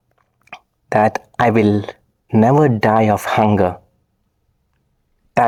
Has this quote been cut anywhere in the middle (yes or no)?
no